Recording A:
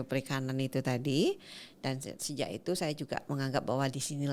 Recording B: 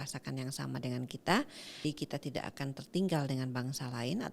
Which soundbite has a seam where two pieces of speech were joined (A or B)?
B